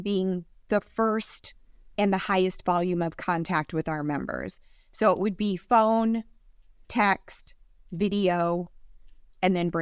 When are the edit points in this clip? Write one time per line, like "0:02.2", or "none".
none